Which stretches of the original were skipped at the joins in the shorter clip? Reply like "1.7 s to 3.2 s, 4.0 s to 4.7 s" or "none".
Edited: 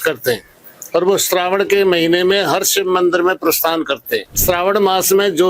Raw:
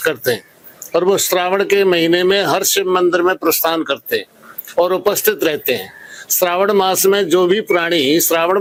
4.3 s to 6.2 s